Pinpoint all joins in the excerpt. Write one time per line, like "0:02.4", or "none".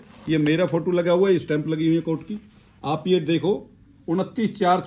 none